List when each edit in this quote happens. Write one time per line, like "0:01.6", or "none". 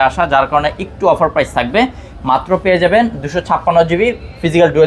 none